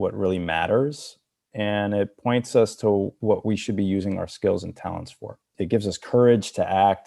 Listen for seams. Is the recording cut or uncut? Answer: cut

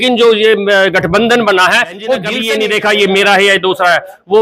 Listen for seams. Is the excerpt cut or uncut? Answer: cut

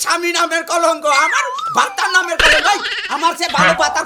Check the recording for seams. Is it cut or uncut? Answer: uncut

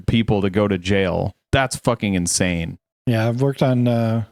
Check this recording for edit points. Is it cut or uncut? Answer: uncut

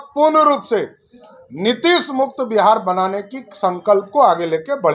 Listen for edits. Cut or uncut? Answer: uncut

